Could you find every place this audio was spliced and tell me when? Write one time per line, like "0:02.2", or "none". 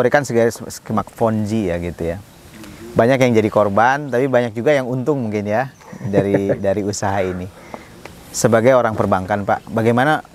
none